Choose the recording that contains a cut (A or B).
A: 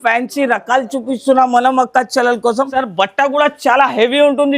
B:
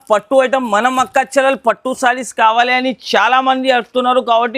A